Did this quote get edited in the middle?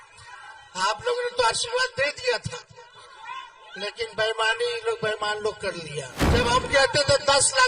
yes; 1 cut; at 6.2 s

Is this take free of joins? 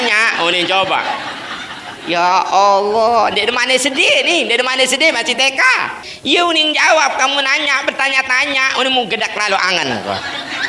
no; 1 cut; at 6.1 s

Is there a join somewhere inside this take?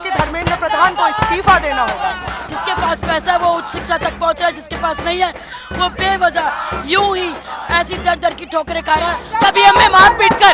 yes; 2 cuts; at 2.3 s, 9.3 s

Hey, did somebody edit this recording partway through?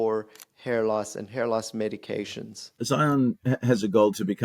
yes; 1 cut; at 2.7 s

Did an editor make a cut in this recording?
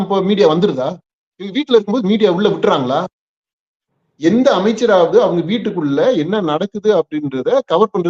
no; 0 cuts

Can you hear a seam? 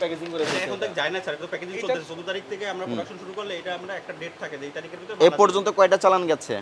no; 0 cuts

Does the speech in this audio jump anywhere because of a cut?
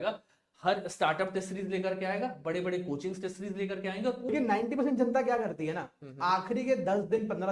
yes; 1 cut; at 4.3 s

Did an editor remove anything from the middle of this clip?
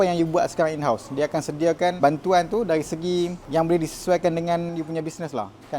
yes; 3 cuts; at 2.0 s, 3.4 s, 4.7 s

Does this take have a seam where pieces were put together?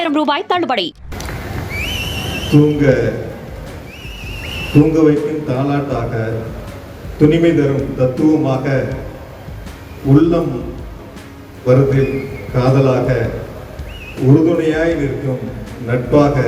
yes; 1 cut; at 1.0 s

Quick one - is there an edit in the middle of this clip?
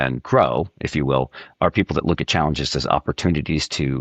no; 0 cuts

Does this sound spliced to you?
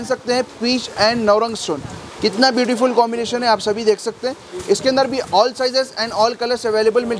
no; 0 cuts

